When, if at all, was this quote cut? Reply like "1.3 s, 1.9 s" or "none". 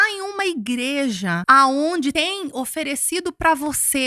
1.4 s, 2.1 s